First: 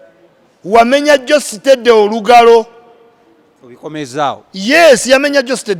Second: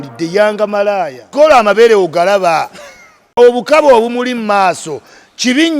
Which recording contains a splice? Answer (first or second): second